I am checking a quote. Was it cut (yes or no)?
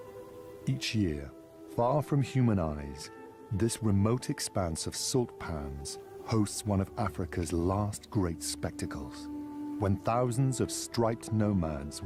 no